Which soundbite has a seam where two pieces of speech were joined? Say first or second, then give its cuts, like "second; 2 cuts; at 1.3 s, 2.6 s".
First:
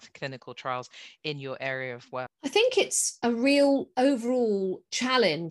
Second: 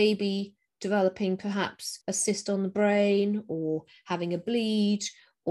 first; 1 cut; at 2.3 s